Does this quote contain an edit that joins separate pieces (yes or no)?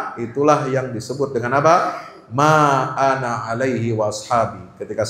no